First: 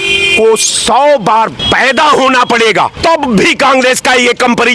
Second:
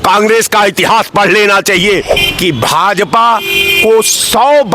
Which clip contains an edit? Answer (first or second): second